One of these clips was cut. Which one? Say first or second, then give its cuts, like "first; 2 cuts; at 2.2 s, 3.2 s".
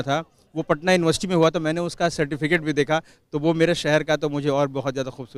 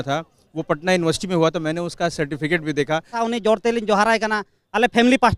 second; 1 cut; at 3.2 s